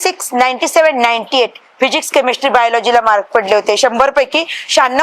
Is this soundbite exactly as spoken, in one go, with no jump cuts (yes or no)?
yes